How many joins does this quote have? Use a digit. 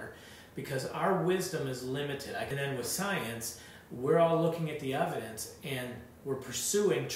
1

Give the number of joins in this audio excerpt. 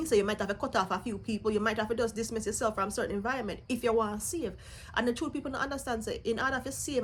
0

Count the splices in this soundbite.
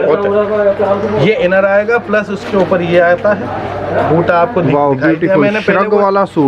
0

